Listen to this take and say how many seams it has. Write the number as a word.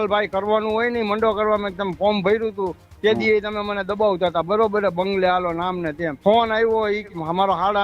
two